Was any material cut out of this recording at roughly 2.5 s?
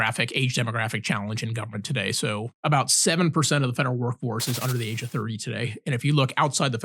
yes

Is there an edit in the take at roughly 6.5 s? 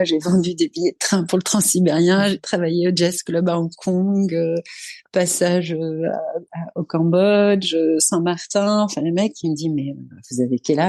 no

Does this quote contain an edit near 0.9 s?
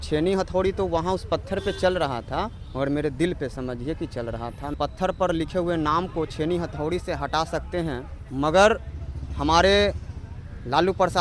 no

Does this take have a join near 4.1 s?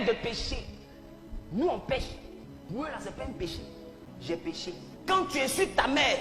yes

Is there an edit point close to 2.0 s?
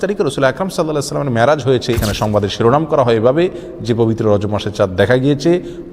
yes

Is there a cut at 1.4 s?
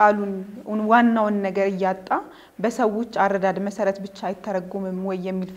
no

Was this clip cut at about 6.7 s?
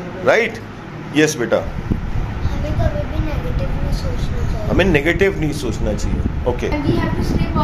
yes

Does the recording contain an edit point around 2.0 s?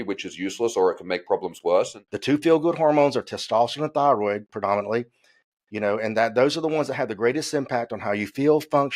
yes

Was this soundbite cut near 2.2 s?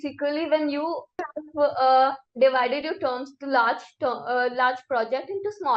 yes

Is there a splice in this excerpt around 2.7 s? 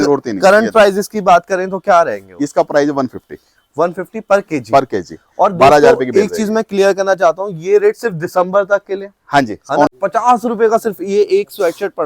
no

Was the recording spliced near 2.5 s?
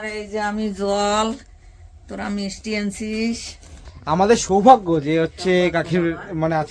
no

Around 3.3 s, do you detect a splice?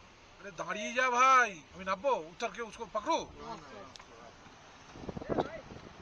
no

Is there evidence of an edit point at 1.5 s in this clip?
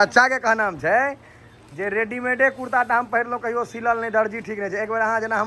no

